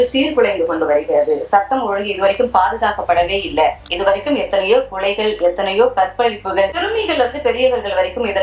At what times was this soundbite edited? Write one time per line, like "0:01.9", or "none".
0:03.9